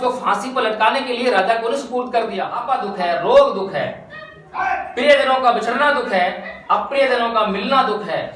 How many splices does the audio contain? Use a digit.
1